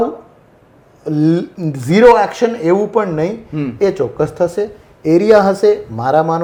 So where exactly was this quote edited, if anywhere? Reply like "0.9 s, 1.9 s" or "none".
none